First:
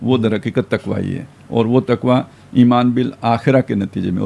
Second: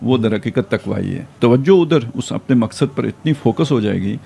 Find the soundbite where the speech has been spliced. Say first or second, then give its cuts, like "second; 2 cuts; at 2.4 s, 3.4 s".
second; 1 cut; at 1.4 s